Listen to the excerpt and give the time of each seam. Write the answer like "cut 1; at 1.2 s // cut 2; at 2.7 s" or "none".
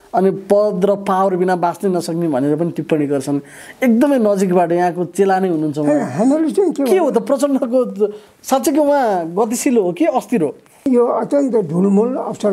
cut 1; at 10.9 s